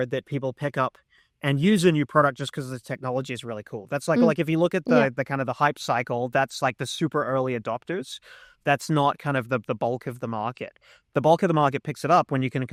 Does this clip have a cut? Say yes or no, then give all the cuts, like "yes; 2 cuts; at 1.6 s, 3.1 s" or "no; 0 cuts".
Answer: no; 0 cuts